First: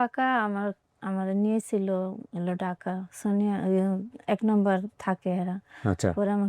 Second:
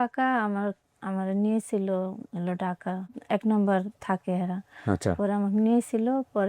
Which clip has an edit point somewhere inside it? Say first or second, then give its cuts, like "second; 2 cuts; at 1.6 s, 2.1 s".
second; 1 cut; at 3.1 s